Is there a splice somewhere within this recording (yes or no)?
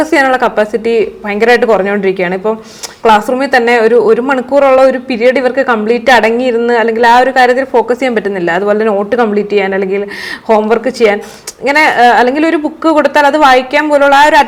no